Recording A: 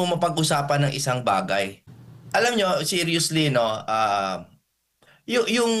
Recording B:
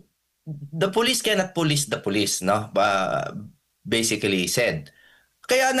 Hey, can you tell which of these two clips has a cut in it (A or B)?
A